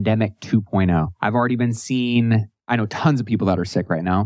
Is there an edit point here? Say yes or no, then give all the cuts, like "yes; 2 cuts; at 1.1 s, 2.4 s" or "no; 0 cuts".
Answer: yes; 2 cuts; at 1.1 s, 2.6 s